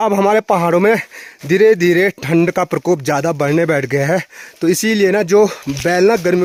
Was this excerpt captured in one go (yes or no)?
yes